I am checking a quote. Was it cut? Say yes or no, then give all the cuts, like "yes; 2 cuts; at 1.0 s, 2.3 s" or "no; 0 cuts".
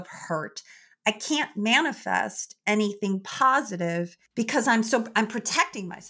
yes; 1 cut; at 4.2 s